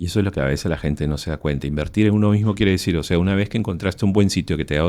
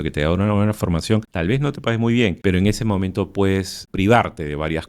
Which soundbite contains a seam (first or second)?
second